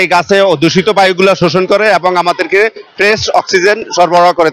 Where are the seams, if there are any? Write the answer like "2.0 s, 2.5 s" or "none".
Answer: none